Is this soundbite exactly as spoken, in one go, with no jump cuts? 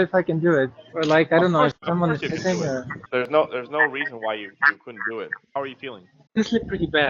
no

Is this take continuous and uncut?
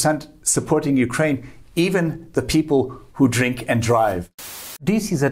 no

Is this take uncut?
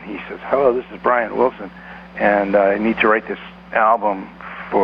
yes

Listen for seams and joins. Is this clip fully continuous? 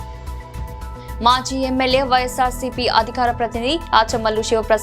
no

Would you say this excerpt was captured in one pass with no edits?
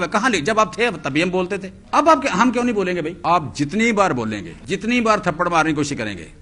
no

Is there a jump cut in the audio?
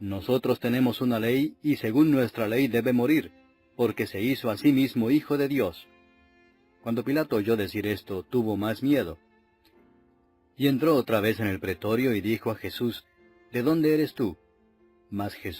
yes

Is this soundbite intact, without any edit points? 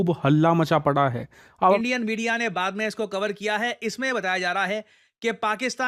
no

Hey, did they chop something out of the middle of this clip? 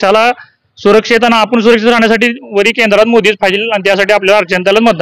no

